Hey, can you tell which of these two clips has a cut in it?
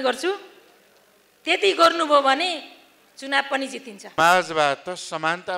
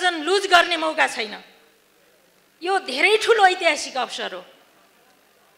first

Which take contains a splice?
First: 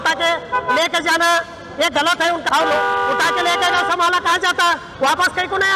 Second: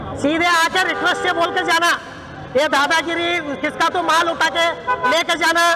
first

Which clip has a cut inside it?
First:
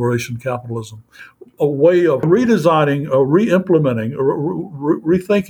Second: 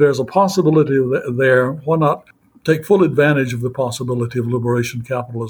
first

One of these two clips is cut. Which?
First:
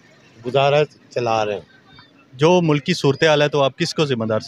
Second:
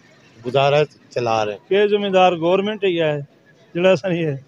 second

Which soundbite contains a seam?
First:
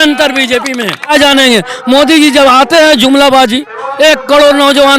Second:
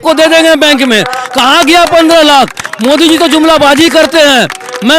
first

